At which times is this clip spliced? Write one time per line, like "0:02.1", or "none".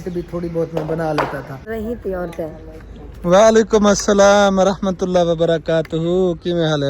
0:01.7